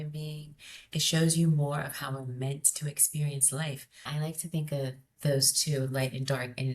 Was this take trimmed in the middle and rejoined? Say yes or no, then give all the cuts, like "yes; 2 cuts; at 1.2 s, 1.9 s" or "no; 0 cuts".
yes; 1 cut; at 4.0 s